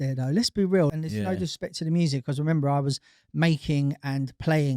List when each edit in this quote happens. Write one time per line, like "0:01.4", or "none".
0:00.9